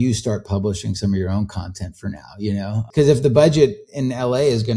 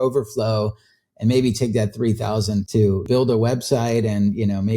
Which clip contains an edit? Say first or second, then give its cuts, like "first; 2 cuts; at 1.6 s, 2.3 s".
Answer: second; 1 cut; at 2.9 s